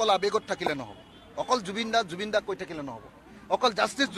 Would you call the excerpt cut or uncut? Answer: uncut